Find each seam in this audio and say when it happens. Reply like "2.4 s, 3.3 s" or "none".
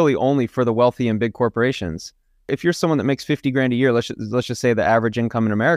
2.5 s